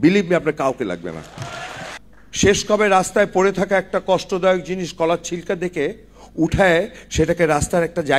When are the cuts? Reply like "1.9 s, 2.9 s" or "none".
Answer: 1.8 s